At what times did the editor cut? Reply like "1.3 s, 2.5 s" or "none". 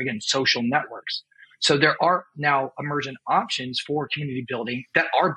none